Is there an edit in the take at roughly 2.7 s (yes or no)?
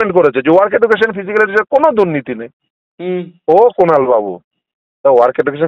no